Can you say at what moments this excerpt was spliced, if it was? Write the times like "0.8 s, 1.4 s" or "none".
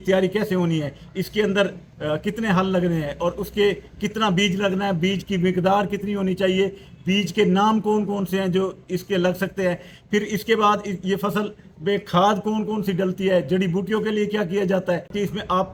none